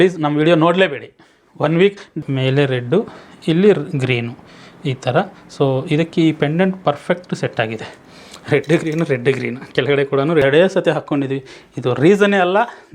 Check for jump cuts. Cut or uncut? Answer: cut